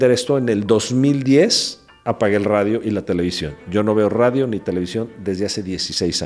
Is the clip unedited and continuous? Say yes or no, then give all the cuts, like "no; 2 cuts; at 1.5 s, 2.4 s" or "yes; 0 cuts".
yes; 0 cuts